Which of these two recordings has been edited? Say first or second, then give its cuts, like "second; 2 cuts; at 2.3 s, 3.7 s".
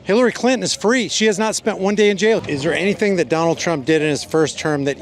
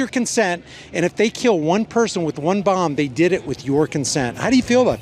first; 1 cut; at 2.4 s